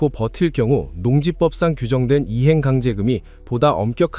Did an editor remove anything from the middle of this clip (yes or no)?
no